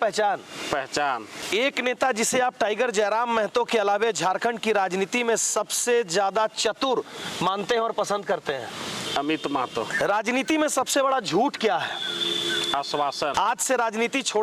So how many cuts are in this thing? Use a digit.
3